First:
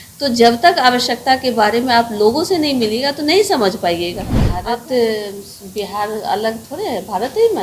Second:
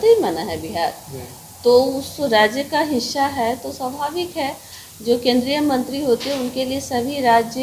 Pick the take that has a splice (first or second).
first